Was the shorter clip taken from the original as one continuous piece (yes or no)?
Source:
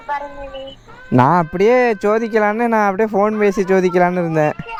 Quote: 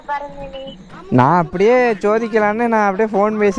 yes